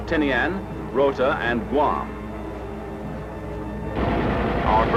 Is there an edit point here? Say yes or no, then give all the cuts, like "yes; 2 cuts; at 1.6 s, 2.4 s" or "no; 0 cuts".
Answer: no; 0 cuts